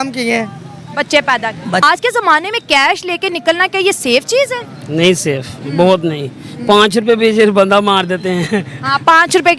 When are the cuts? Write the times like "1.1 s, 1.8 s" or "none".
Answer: 1.8 s